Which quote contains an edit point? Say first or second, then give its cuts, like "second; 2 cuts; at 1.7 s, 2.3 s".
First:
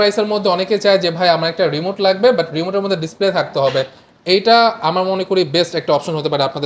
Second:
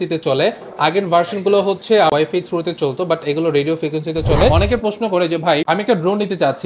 second; 3 cuts; at 2.1 s, 4.5 s, 5.6 s